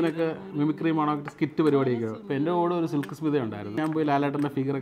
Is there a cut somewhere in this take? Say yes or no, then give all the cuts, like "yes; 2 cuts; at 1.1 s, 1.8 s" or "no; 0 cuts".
yes; 2 cuts; at 2.2 s, 3.8 s